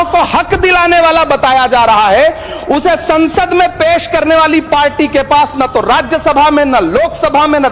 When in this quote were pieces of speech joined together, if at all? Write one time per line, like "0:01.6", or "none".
none